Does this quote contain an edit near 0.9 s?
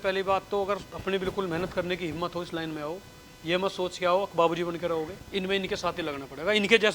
yes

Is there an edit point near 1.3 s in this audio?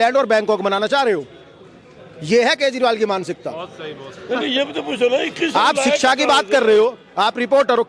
no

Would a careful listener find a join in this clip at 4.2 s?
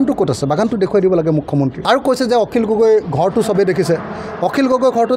no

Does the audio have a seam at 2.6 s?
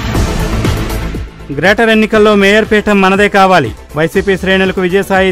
no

